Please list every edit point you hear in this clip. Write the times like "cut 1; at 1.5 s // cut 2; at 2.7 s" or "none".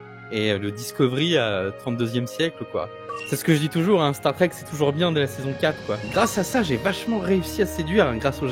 cut 1; at 3.2 s // cut 2; at 6.0 s